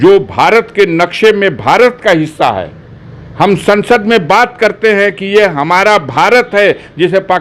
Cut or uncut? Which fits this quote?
uncut